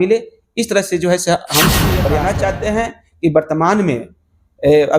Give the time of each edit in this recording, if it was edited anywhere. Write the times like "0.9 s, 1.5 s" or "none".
2.1 s